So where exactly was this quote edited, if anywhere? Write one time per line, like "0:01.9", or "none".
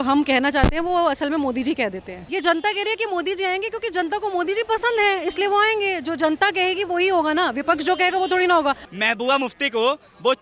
0:02.2
0:08.9